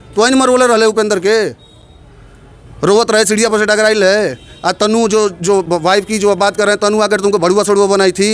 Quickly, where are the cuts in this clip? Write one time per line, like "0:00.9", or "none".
none